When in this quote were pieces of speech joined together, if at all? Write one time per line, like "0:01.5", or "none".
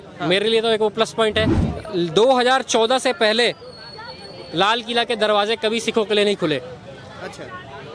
0:01.6